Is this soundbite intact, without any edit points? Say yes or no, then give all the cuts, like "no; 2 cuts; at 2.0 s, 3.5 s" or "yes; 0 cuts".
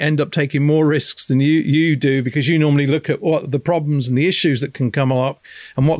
yes; 0 cuts